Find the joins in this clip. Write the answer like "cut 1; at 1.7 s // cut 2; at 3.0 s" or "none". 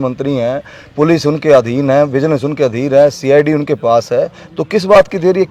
none